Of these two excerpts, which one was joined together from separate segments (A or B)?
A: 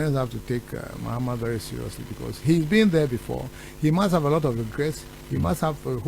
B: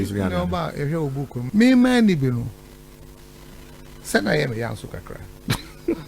B